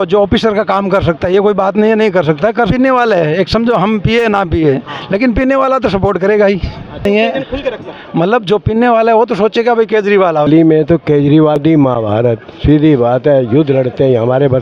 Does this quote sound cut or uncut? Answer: cut